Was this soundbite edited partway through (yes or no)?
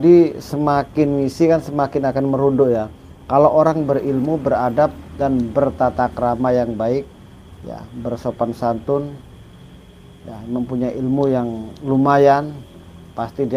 no